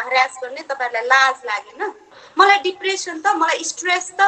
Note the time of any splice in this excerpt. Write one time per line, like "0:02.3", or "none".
0:02.2